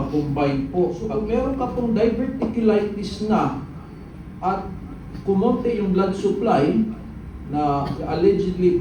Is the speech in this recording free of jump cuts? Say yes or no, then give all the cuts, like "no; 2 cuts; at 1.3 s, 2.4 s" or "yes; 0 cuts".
no; 1 cut; at 1.0 s